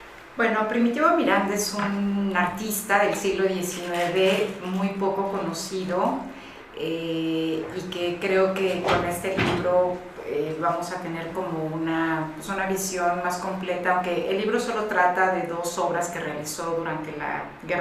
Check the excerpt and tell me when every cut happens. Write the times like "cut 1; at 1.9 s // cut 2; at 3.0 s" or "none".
none